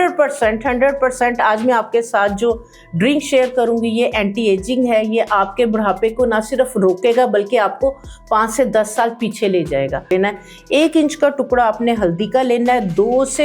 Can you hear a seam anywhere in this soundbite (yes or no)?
yes